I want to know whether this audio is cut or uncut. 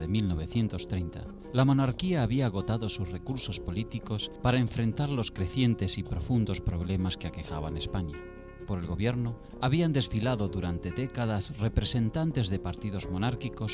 uncut